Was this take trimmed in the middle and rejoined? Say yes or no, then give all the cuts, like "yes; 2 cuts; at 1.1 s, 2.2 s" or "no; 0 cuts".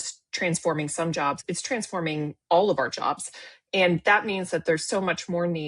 yes; 1 cut; at 1.4 s